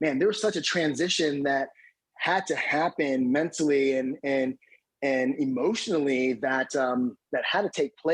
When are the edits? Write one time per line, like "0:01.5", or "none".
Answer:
0:07.2

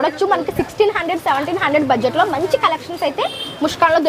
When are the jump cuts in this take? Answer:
none

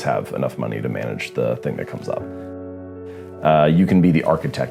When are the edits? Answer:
0:02.8

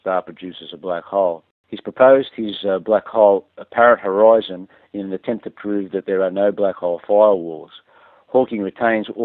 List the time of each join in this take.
0:04.4

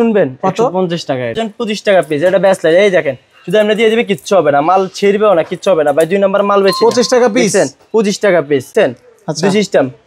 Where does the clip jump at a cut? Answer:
0:01.3
0:08.7

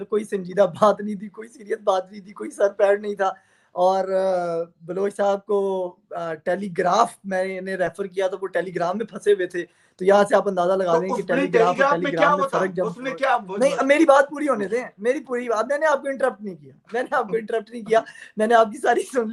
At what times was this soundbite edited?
none

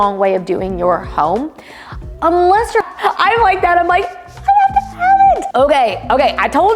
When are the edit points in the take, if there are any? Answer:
0:02.8
0:05.4

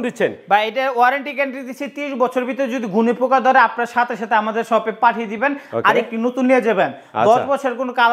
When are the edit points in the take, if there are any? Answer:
none

